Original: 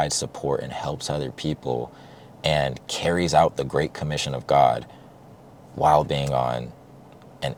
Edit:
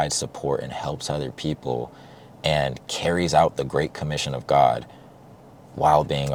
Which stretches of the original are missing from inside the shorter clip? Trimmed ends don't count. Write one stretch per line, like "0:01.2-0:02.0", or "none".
none